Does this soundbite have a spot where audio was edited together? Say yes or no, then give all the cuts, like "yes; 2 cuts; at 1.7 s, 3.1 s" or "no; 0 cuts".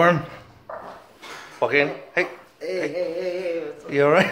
no; 0 cuts